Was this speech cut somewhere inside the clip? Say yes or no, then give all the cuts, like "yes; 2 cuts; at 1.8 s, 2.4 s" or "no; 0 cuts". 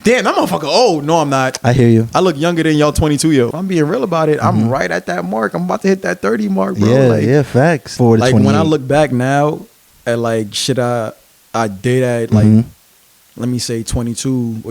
yes; 2 cuts; at 3.5 s, 7.9 s